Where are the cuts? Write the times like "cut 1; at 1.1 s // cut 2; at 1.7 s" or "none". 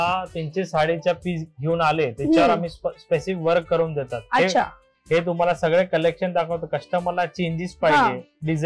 none